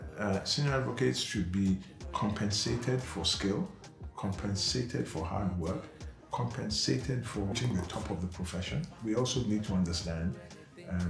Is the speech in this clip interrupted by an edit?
yes; 2 cuts; at 7.5 s, 9.0 s

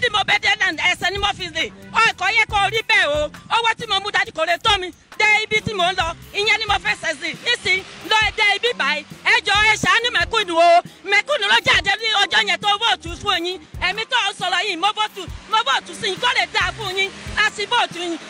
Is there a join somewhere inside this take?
no; 0 cuts

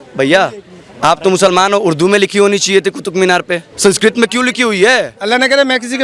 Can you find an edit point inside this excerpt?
yes; 2 cuts; at 3.7 s, 5.2 s

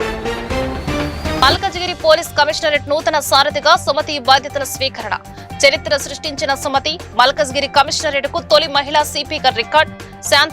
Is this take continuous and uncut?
no; 1 cut; at 1.4 s

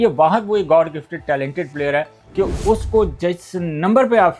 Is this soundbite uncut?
yes; 0 cuts

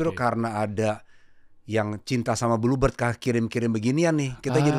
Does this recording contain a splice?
no; 0 cuts

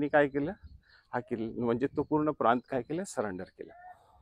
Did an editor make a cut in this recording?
no; 0 cuts

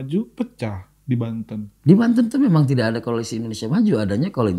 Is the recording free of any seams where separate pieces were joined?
yes; 0 cuts

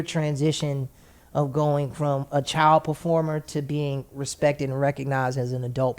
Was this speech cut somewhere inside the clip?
no; 0 cuts

